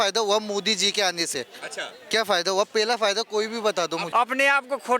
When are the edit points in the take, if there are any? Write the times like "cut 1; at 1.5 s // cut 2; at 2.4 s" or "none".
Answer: cut 1; at 4.0 s